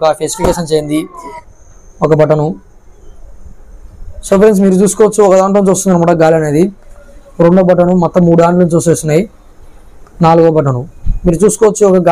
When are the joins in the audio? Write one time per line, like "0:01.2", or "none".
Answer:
0:01.4